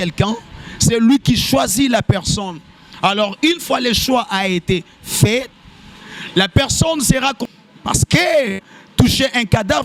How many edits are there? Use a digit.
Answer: 1